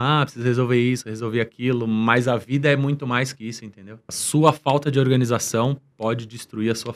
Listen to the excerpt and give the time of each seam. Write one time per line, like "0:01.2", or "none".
0:04.1